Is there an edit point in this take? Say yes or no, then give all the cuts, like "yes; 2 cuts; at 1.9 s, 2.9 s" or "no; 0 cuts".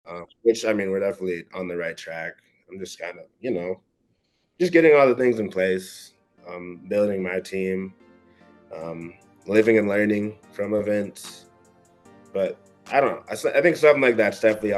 no; 0 cuts